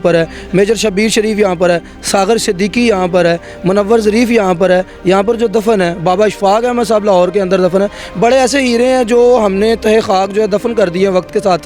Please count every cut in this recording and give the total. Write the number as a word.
zero